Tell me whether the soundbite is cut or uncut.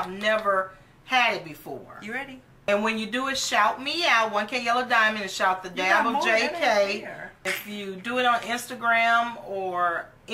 cut